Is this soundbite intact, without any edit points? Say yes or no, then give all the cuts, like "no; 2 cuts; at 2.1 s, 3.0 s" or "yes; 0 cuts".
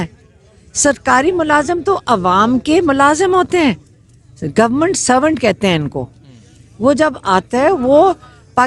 yes; 0 cuts